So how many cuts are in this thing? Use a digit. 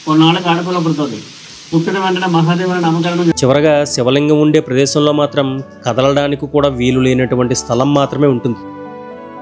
1